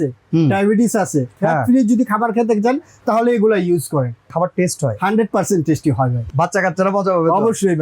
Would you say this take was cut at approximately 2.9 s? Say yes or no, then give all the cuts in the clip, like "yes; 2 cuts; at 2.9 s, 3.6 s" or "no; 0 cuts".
no; 3 cuts; at 1.3 s, 4.3 s, 6.2 s